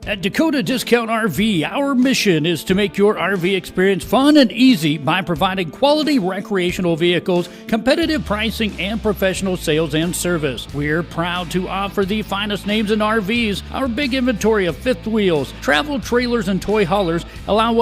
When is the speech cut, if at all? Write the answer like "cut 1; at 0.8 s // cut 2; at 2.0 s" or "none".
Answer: cut 1; at 1.7 s